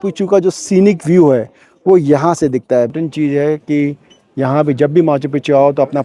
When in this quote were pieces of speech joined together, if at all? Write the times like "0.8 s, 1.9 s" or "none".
2.9 s